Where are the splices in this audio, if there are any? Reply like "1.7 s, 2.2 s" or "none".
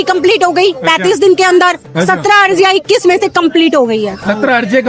none